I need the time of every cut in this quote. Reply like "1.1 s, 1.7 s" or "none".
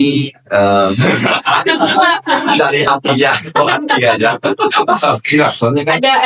none